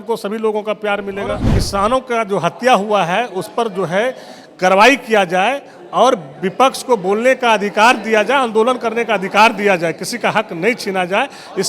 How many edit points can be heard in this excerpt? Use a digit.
1